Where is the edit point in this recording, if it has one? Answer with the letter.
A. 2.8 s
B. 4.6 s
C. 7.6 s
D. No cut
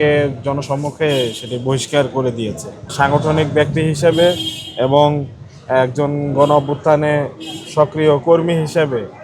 A